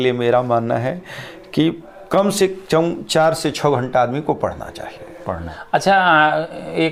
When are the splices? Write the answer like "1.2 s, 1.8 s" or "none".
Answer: none